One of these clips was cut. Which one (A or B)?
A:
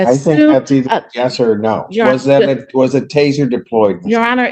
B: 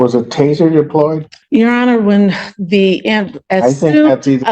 B